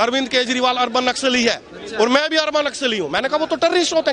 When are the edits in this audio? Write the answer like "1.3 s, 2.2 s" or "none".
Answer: none